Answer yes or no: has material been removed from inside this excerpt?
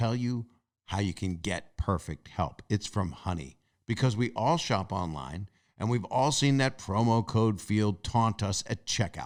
no